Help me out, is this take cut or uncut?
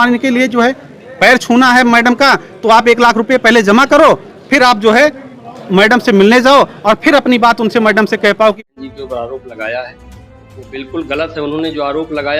cut